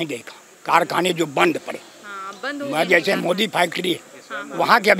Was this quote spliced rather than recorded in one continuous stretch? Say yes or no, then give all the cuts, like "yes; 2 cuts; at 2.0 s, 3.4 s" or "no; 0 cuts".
no; 0 cuts